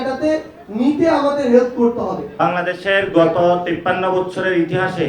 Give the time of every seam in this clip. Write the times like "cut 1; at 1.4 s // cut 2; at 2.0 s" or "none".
cut 1; at 2.3 s